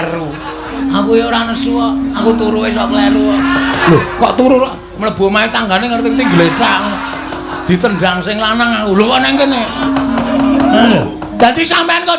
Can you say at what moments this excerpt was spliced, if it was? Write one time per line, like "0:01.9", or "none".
0:00.8
0:02.2
0:03.8
0:09.8

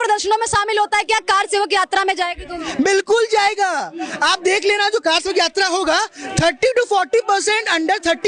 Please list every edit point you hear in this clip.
none

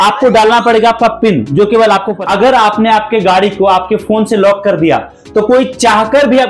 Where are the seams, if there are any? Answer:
0:02.1

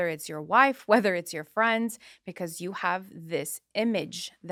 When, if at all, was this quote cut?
none

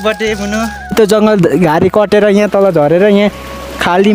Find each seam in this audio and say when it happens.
0:00.9

